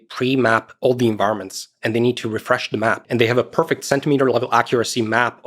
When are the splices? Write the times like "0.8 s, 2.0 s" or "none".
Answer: 3.0 s